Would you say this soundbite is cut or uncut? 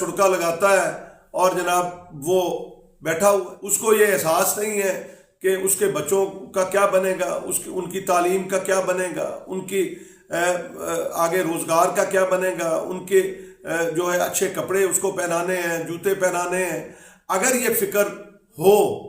uncut